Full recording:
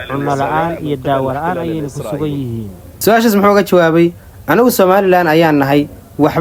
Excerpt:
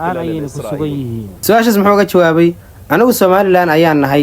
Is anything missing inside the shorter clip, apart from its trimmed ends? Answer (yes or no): yes